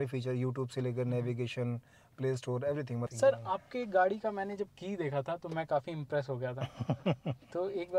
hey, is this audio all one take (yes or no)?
no